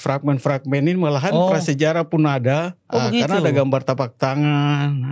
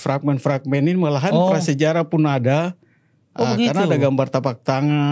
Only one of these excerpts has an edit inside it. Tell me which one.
first; 1 cut; at 2.8 s

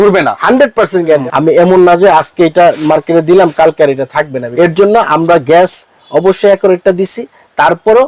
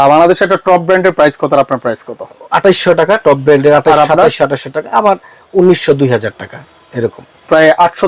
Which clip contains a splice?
first; 2 cuts; at 1.2 s, 4.4 s

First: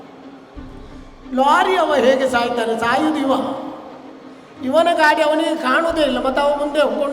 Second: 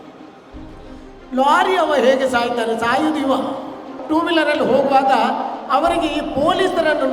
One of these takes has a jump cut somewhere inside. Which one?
second; 1 cut; at 3.9 s

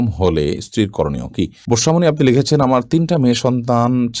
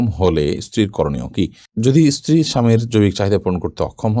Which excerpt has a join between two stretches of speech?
first; 1 cut; at 1.6 s

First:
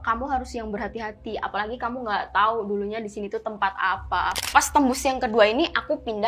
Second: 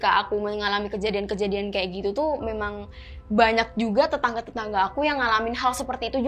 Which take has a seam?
first; 1 cut; at 4.4 s

